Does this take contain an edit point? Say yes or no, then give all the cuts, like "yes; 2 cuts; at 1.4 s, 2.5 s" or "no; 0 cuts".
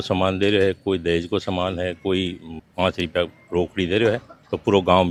no; 0 cuts